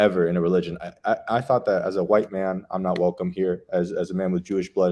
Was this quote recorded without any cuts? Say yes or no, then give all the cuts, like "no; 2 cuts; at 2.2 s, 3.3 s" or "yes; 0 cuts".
yes; 0 cuts